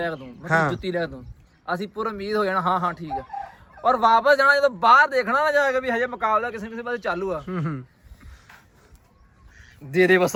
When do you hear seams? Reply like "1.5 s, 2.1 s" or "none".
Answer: none